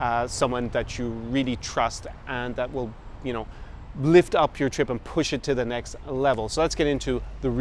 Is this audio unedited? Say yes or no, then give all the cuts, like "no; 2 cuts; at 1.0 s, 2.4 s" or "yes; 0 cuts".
yes; 0 cuts